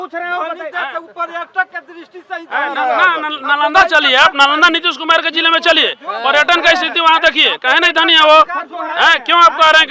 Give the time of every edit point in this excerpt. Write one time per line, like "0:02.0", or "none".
none